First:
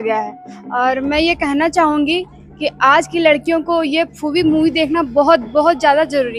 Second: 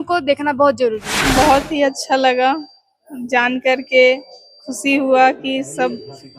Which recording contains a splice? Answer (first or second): second